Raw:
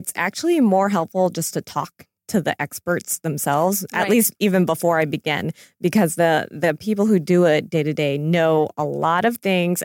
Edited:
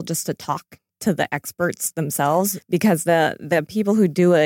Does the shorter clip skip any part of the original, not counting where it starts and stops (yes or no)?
yes